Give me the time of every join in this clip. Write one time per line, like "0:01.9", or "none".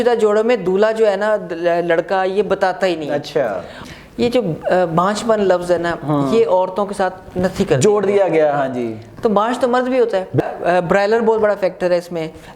0:03.8
0:10.4